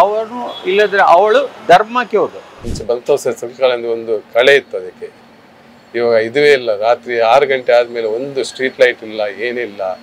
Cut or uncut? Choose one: cut